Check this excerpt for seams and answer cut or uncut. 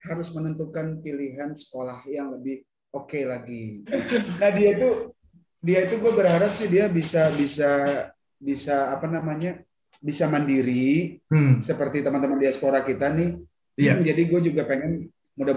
cut